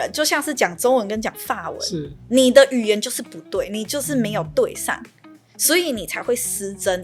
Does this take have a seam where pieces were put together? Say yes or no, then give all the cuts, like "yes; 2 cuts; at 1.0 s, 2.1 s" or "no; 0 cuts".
no; 0 cuts